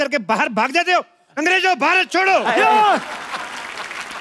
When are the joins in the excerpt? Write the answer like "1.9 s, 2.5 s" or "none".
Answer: none